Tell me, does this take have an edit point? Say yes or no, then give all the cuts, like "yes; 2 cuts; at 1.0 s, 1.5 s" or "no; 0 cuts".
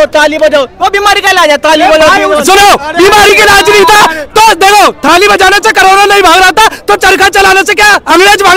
no; 0 cuts